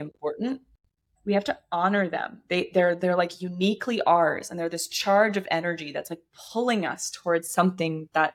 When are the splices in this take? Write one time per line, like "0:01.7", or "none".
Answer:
0:01.1